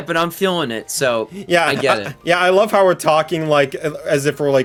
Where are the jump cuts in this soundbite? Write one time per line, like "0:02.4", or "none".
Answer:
none